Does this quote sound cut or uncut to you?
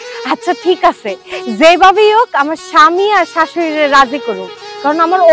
uncut